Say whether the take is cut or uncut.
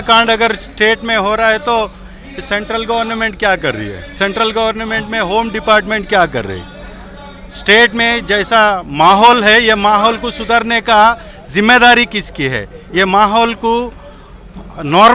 uncut